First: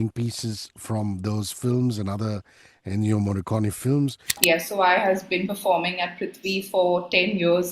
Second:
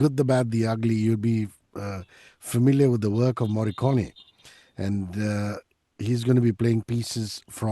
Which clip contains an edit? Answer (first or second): first